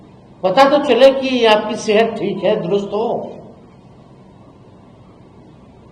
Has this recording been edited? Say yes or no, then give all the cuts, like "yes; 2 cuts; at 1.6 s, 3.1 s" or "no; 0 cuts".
no; 0 cuts